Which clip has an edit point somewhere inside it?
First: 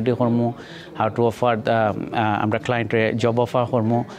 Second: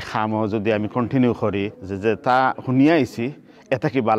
second; 1 cut; at 1.8 s

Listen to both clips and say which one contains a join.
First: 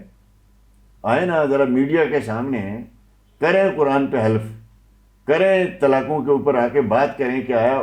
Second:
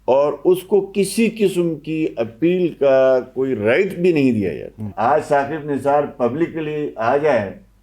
second; 1 cut; at 4.9 s

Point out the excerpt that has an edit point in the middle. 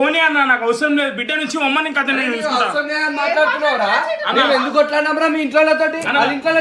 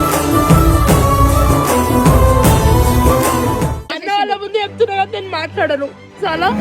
second; 1 cut; at 3.9 s

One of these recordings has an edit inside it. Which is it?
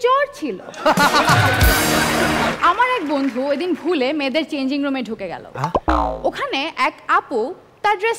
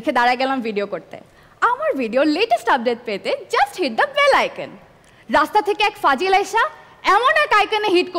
first; 1 cut; at 2.5 s

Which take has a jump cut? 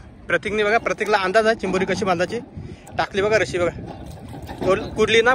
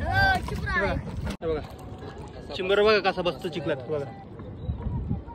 second; 1 cut; at 1.3 s

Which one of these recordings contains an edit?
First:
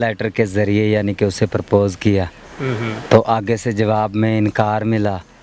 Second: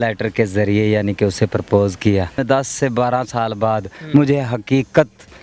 second; 1 cut; at 2.4 s

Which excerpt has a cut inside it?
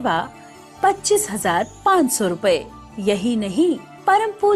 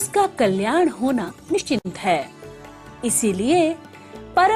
second; 1 cut; at 1.7 s

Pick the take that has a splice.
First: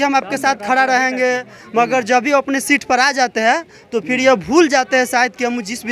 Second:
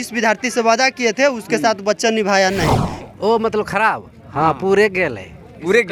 second; 1 cut; at 2.9 s

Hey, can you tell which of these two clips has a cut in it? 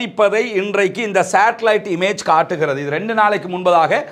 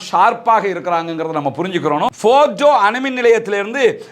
second; 1 cut; at 2.2 s

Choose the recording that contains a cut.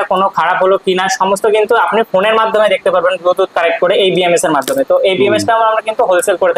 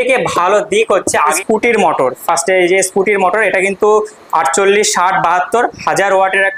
second; 1 cut; at 1.3 s

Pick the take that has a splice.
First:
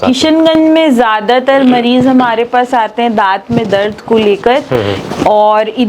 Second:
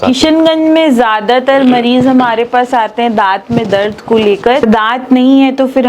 second; 1 cut; at 4.6 s

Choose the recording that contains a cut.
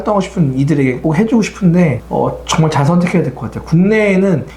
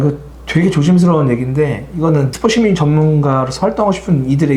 second; 1 cut; at 2.3 s

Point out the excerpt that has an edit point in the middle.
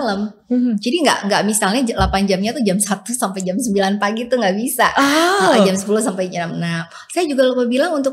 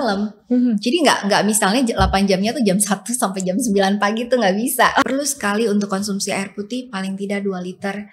second; 1 cut; at 5.0 s

